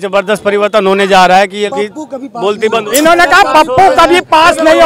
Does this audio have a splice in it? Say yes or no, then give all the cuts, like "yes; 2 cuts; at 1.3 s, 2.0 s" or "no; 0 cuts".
yes; 1 cut; at 1.7 s